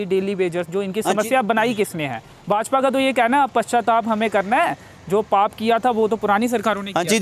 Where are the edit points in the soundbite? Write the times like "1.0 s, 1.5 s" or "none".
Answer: none